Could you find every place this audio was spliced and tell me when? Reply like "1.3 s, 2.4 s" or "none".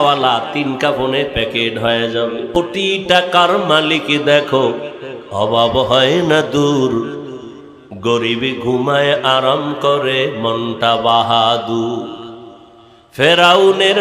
2.6 s